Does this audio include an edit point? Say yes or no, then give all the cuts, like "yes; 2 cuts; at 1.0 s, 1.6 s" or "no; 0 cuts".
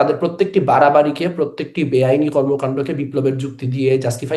no; 0 cuts